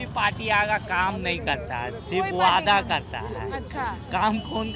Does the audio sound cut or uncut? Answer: uncut